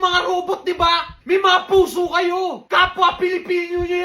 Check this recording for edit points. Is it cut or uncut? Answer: cut